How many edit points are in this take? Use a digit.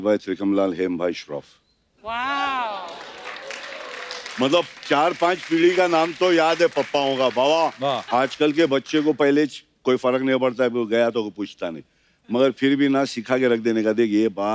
0